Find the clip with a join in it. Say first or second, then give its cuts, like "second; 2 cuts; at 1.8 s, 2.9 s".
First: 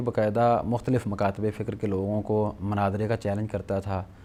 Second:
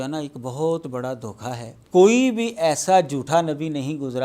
second; 1 cut; at 1.7 s